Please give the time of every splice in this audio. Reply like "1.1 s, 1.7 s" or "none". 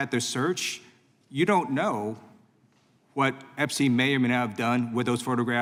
none